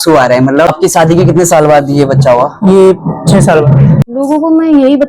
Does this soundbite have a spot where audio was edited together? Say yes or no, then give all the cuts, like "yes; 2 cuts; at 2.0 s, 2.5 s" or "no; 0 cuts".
yes; 2 cuts; at 0.7 s, 4.0 s